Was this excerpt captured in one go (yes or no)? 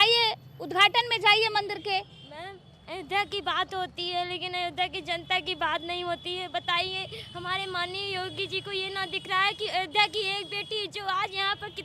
yes